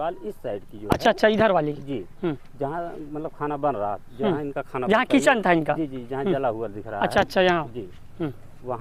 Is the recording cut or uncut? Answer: uncut